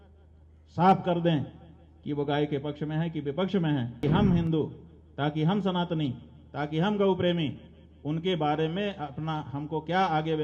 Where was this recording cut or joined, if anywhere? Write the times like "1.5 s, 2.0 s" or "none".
4.0 s

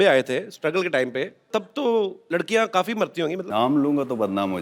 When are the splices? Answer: 1.5 s, 2.2 s, 3.4 s

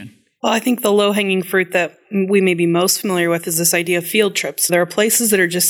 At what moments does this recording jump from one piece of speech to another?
4.7 s

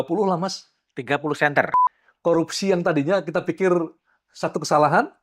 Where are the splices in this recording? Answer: 1.7 s

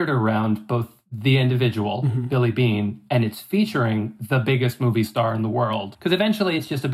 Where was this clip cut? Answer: 5.9 s

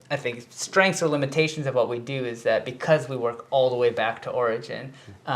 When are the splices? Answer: none

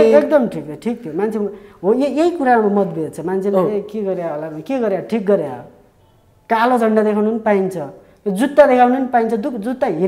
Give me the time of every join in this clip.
none

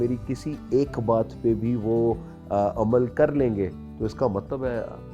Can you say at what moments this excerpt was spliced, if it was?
none

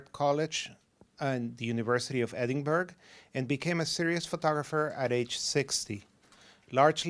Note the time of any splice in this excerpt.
none

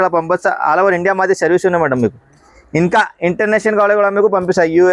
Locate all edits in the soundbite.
none

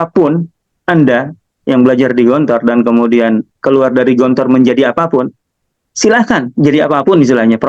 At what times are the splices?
none

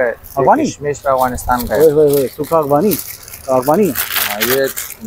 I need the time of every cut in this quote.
none

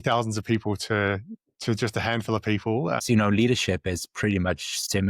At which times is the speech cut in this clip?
3.0 s

